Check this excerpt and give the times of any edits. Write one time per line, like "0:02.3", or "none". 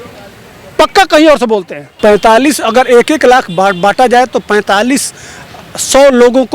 0:01.8